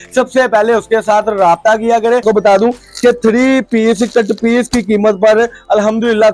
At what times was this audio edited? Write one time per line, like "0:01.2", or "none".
0:02.2